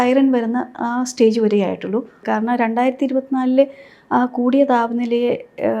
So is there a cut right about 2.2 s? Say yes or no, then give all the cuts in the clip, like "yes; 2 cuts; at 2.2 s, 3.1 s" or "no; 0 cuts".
yes; 1 cut; at 2.2 s